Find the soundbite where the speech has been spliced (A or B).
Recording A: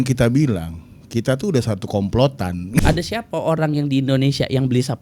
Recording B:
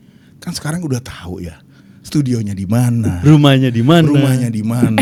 A